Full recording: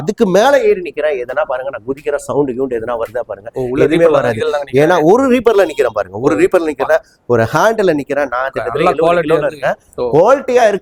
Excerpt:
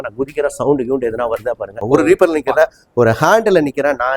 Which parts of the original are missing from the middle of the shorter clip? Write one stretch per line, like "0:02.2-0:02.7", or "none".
0:03.4-0:06.1